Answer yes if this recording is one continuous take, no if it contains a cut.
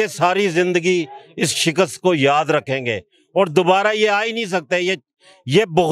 yes